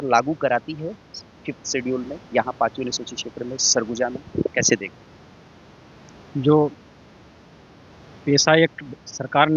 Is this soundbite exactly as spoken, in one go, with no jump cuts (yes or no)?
yes